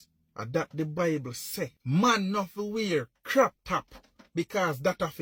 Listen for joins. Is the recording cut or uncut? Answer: uncut